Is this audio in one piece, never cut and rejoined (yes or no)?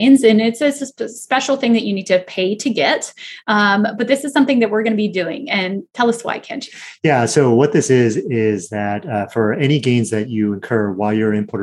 yes